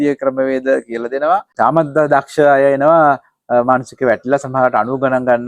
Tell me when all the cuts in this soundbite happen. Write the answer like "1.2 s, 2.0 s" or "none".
1.5 s